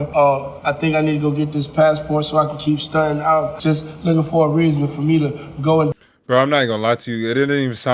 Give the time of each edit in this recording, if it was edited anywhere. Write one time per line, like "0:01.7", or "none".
none